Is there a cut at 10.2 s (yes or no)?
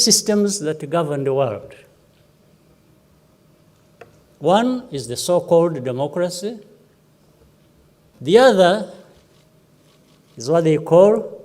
no